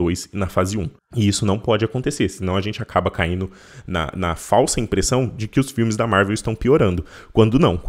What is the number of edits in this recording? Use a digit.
1